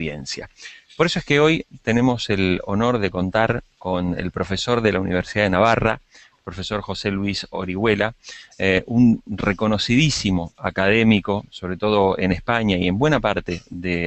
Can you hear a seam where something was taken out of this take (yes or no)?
yes